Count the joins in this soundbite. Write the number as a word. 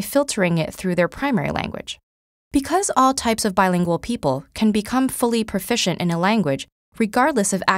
one